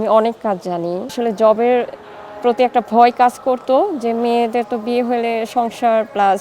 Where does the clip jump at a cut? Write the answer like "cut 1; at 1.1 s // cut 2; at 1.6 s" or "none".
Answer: cut 1; at 1.1 s